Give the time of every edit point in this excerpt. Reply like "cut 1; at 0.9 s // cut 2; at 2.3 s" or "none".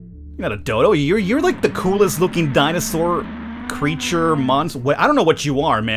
none